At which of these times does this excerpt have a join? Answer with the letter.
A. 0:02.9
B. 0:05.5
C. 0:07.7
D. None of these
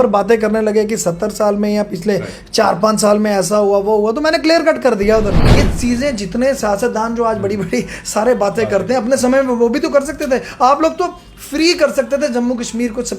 B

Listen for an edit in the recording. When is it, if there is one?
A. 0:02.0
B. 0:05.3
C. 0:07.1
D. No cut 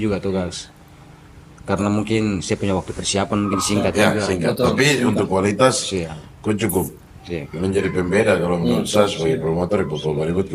D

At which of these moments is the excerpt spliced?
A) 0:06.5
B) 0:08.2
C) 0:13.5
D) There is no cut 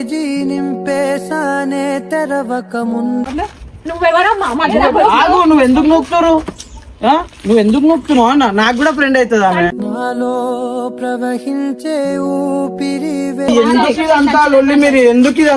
C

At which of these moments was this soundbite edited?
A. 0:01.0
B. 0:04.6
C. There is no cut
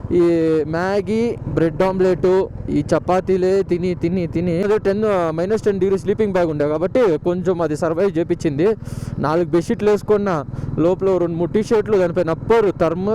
B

